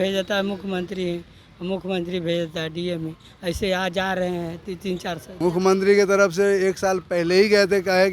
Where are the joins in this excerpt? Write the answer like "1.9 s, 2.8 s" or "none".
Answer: 5.3 s